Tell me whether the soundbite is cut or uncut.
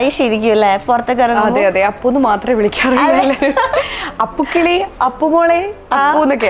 uncut